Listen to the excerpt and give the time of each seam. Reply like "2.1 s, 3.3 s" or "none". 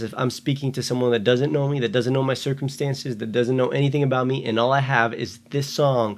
none